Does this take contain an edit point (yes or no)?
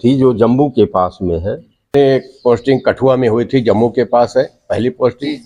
yes